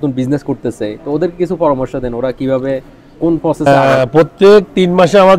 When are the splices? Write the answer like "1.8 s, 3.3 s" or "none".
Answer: 3.7 s